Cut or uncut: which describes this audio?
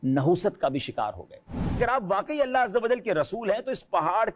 cut